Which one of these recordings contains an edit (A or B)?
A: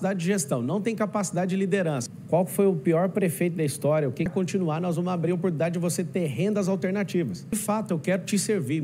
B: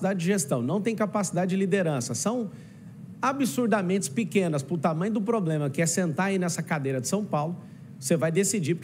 A